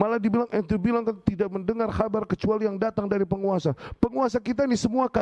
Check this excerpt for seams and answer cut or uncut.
uncut